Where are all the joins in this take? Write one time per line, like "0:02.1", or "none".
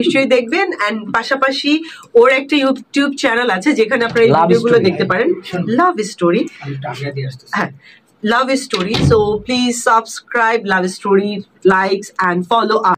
none

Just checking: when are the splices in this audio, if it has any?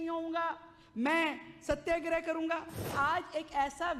0:02.9

